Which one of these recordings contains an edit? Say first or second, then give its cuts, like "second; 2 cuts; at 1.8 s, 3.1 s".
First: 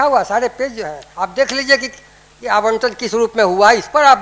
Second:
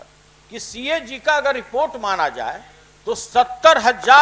first; 1 cut; at 1.0 s